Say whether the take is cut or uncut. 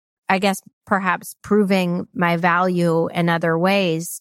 cut